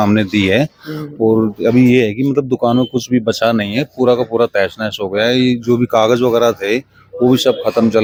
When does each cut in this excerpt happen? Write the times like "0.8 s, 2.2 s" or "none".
none